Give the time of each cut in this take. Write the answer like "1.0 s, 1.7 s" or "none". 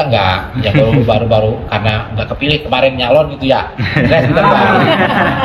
none